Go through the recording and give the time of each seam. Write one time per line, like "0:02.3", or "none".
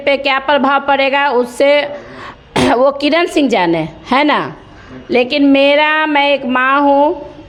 none